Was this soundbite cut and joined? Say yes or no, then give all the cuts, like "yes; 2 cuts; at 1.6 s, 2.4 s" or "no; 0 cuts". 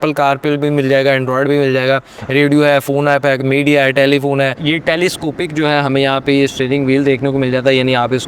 yes; 1 cut; at 4.6 s